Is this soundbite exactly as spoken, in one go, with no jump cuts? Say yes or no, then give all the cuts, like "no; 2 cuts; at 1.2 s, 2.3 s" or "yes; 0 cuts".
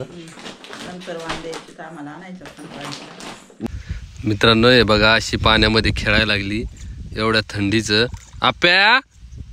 no; 1 cut; at 3.7 s